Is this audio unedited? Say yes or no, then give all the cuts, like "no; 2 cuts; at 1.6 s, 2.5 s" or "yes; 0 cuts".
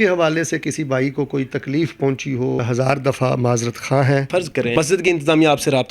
no; 2 cuts; at 2.6 s, 4.7 s